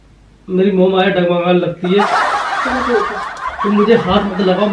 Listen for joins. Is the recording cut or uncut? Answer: uncut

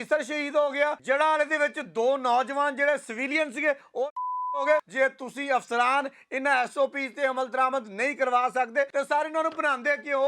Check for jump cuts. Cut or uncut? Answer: cut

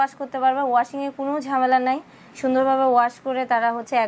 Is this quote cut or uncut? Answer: uncut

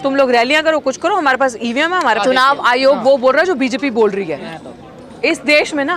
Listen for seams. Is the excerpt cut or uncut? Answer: cut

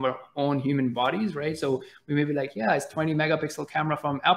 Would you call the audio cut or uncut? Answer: uncut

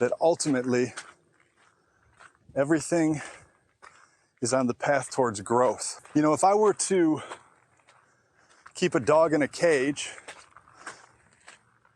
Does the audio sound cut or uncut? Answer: cut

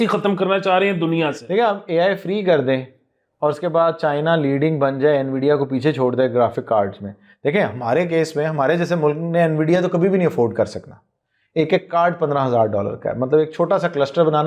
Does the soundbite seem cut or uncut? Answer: uncut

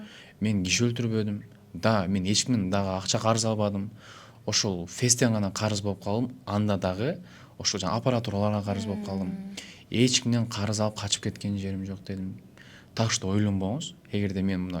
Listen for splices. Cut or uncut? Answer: uncut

